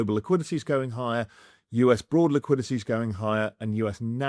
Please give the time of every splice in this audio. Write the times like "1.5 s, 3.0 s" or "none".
none